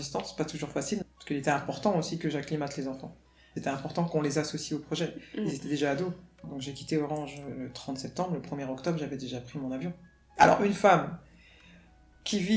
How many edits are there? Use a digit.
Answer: 3